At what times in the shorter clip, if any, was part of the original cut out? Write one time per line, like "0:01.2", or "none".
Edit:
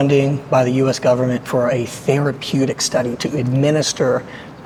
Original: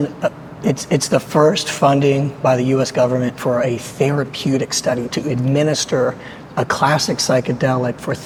none